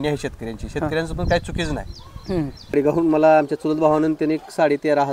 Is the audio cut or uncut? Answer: cut